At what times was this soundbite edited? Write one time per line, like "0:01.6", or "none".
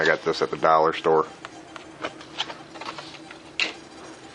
none